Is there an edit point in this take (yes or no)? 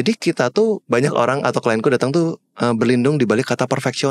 no